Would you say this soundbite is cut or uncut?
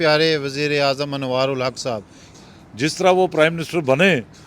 cut